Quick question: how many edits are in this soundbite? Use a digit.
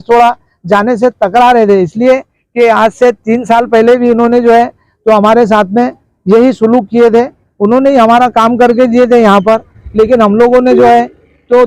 0